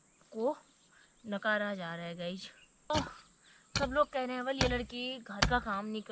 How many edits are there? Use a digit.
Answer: 1